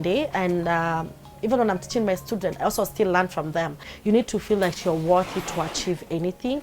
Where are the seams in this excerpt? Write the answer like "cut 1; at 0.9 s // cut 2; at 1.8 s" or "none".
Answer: cut 1; at 3.9 s